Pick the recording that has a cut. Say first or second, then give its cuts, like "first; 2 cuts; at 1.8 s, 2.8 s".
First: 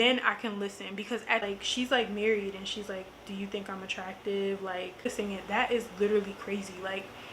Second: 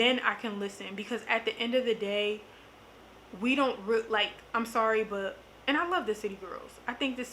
first; 2 cuts; at 1.5 s, 5.0 s